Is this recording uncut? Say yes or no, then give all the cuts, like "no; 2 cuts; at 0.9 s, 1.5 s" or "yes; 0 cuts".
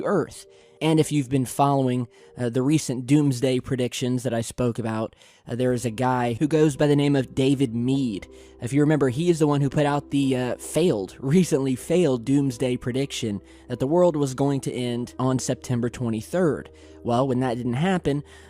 no; 1 cut; at 13.2 s